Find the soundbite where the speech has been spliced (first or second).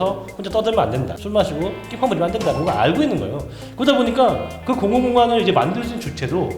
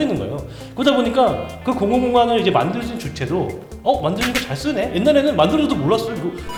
first